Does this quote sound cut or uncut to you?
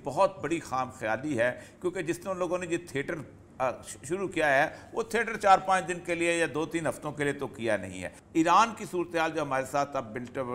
cut